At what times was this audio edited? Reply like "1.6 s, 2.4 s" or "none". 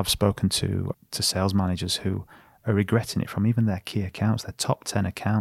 1.0 s